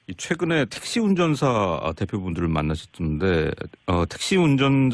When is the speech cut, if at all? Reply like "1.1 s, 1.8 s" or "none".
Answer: 1.5 s